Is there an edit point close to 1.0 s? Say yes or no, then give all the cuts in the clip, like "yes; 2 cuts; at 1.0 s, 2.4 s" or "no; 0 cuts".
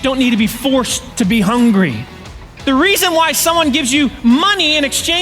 yes; 2 cuts; at 1.0 s, 2.2 s